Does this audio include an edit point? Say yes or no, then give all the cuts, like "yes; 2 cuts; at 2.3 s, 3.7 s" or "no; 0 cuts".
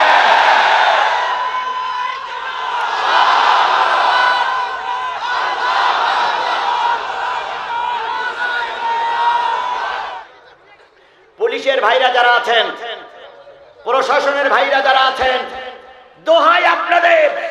yes; 1 cut; at 10.2 s